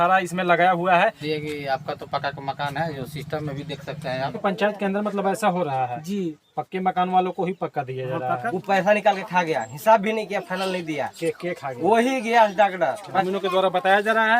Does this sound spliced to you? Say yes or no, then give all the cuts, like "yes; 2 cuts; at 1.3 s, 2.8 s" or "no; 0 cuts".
yes; 4 cuts; at 1.2 s, 4.3 s, 8.4 s, 13.1 s